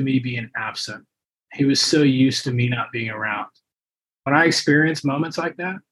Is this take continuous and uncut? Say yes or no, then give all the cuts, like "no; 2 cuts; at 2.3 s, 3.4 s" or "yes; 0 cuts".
no; 1 cut; at 4.2 s